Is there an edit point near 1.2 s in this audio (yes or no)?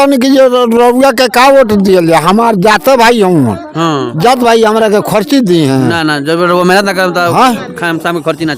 no